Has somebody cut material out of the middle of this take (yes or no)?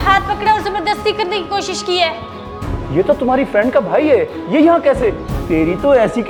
no